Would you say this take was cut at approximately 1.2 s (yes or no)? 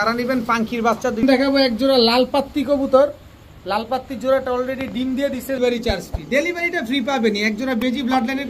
yes